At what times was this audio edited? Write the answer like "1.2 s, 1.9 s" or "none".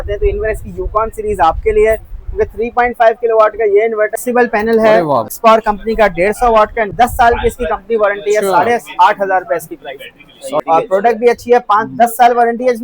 4.1 s, 5.3 s, 6.9 s, 10.6 s